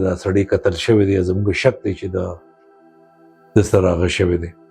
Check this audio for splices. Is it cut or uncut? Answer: uncut